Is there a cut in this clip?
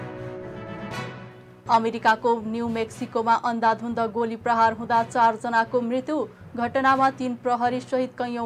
yes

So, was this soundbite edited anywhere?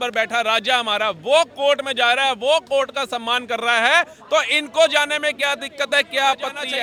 no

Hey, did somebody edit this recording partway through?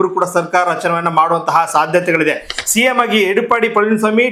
yes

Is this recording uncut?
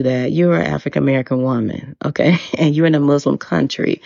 yes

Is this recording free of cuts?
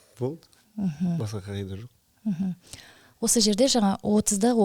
yes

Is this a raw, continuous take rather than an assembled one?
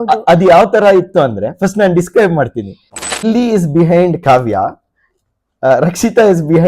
no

